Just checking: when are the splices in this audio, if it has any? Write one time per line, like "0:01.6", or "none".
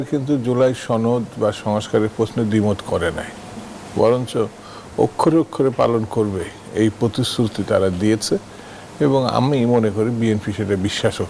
none

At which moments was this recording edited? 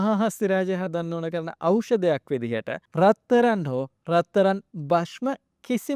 0:02.8

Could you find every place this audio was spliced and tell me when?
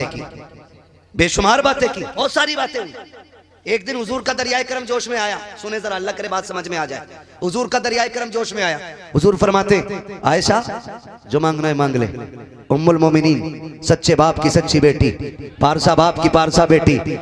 0:02.2

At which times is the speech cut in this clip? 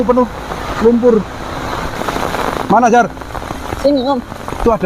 0:01.9

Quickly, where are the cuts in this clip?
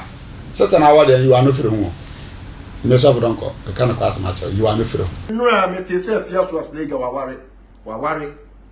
0:05.2

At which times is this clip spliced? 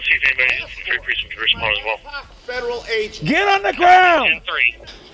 none

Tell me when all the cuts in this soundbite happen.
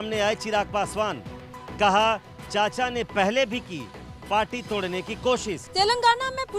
0:05.6

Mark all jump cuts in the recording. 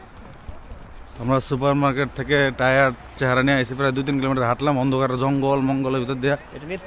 none

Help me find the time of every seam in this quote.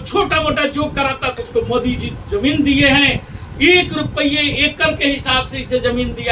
0:01.4

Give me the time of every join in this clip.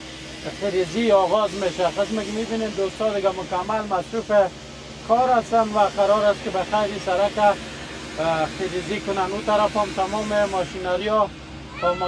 none

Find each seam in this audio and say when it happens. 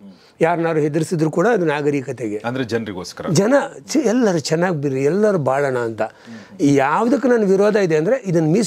none

